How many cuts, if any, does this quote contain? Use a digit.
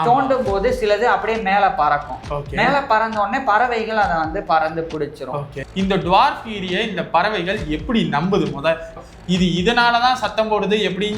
2